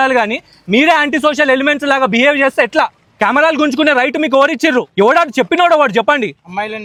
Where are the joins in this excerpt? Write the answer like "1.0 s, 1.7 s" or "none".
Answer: none